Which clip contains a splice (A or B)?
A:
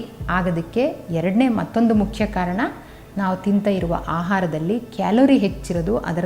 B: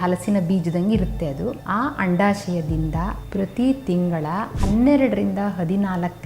B